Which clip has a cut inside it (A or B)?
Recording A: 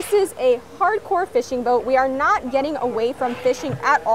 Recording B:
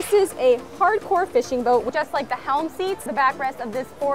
B